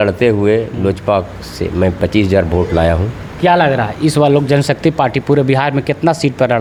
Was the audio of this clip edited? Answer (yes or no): no